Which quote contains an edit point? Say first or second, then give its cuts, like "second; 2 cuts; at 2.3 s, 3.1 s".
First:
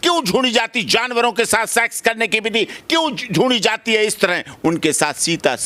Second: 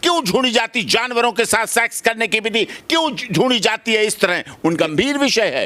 second; 1 cut; at 4.6 s